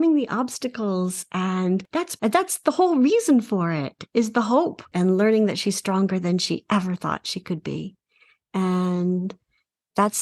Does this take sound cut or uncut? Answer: cut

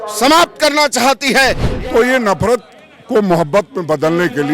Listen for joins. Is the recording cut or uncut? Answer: cut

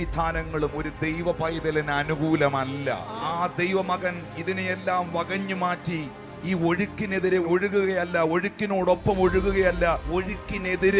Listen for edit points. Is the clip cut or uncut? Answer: cut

